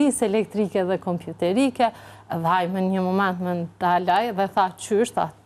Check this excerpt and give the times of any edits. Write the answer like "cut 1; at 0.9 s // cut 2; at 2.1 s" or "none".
none